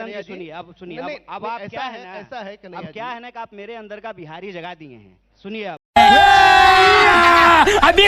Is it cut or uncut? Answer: uncut